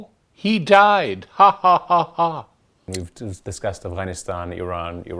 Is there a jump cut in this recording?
yes; 1 cut; at 2.9 s

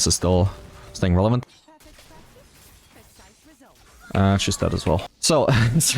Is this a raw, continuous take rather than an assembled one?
no; 2 cuts; at 1.4 s, 5.0 s

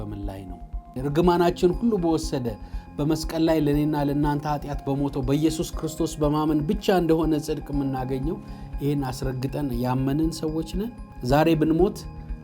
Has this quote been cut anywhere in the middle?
yes; 2 cuts; at 0.9 s, 11.1 s

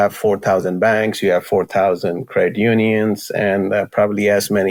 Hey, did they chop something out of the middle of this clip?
no; 0 cuts

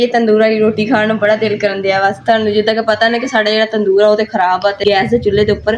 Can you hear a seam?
yes; 1 cut; at 4.8 s

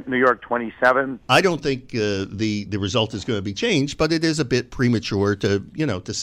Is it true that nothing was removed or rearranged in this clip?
no; 1 cut; at 1.2 s

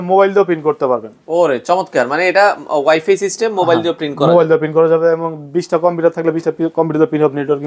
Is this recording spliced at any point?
no; 0 cuts

